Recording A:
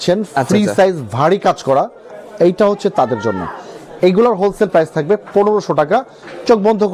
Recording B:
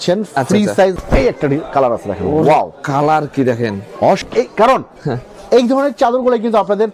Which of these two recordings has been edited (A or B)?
B